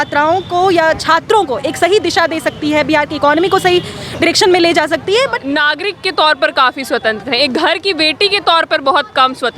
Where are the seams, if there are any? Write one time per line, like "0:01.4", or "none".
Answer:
0:05.4